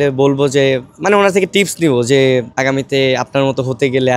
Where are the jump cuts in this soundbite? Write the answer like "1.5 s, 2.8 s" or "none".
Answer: 2.5 s